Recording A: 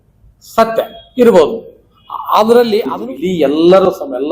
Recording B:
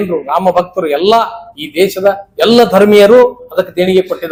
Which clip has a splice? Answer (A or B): A